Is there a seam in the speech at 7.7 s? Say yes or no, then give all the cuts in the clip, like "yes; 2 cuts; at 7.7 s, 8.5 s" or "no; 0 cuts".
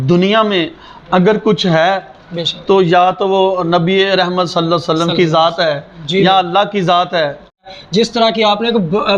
yes; 1 cut; at 7.7 s